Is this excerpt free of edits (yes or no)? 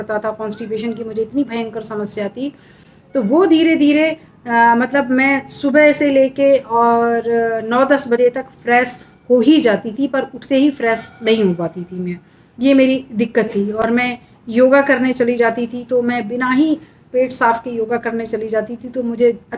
yes